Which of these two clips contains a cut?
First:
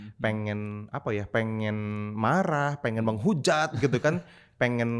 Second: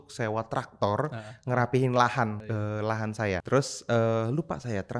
second; 2 cuts; at 2.4 s, 3.4 s

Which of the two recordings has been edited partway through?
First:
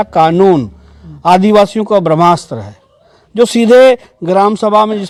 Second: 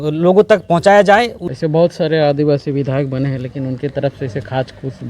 second; 1 cut; at 1.4 s

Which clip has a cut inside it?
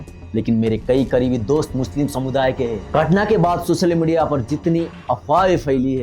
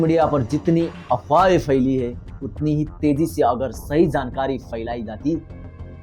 first; 1 cut; at 2.8 s

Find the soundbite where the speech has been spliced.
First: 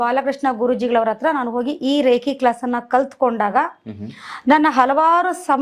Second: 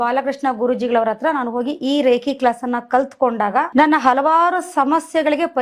second; 1 cut; at 3.7 s

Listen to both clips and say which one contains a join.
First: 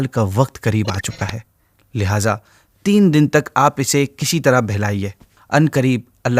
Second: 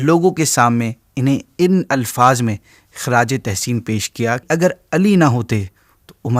second; 1 cut; at 4.4 s

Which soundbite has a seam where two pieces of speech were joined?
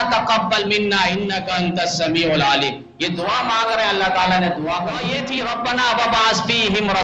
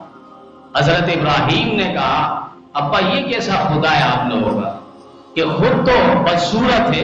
first; 1 cut; at 5.1 s

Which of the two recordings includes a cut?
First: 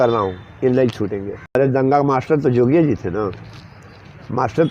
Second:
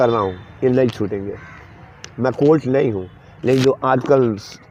first; 1 cut; at 1.6 s

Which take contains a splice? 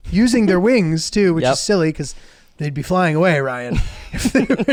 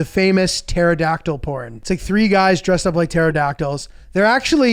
second; 1 cut; at 1.7 s

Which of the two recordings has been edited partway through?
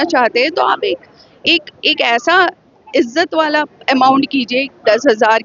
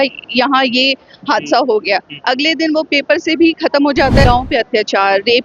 second; 1 cut; at 4.2 s

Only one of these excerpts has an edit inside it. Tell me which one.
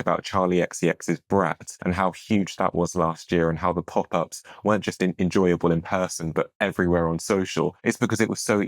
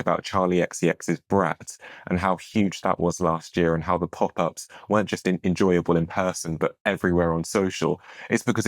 first; 2 cuts; at 1.7 s, 7.8 s

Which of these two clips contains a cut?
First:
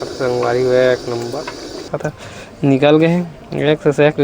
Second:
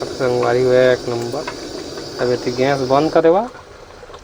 first; 1 cut; at 1.9 s

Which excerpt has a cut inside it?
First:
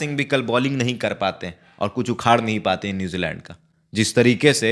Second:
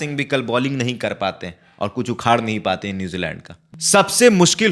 second; 1 cut; at 3.7 s

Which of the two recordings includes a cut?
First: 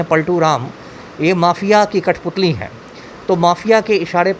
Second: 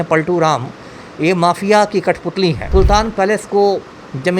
second; 1 cut; at 2.7 s

